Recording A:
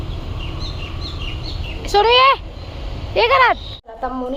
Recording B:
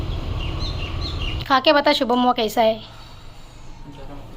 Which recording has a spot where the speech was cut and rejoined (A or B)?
B